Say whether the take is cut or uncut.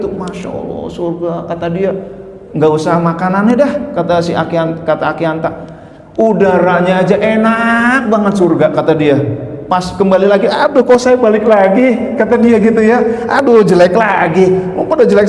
uncut